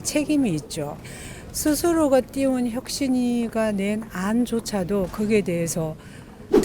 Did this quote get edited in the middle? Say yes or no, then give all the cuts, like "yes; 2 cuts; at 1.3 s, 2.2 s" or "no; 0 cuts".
yes; 1 cut; at 1.2 s